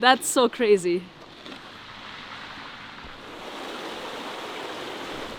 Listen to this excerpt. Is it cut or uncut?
uncut